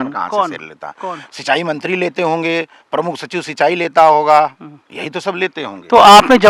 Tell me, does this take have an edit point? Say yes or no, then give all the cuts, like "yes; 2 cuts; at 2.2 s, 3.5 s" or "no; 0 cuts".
no; 0 cuts